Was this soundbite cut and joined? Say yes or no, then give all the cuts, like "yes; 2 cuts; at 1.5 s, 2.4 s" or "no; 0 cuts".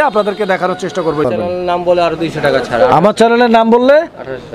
yes; 1 cut; at 1.3 s